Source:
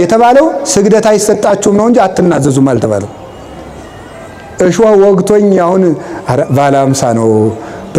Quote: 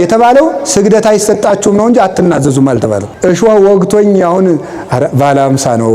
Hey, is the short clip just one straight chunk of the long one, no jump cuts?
no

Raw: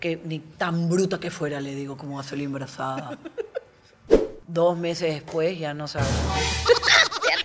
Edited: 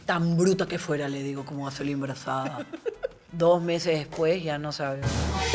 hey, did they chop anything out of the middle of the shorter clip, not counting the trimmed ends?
yes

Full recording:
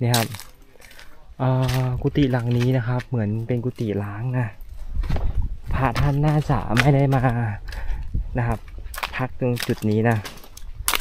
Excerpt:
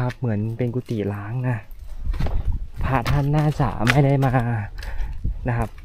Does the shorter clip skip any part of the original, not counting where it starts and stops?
no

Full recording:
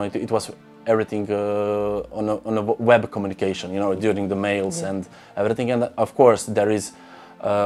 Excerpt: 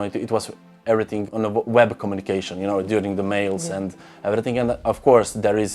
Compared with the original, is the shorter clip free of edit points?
no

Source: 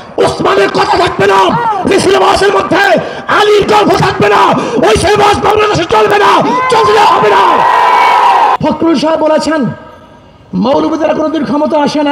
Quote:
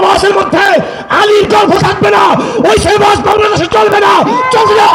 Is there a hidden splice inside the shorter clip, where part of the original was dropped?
no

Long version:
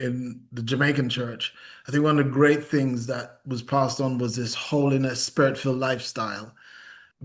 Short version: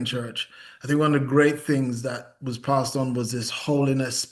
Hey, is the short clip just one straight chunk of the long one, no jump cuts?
yes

